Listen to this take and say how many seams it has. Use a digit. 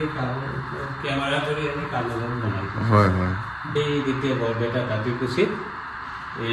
1